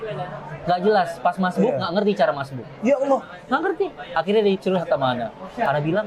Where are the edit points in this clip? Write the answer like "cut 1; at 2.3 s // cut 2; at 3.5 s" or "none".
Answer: none